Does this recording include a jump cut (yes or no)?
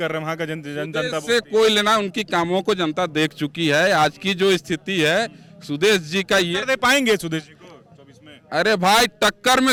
no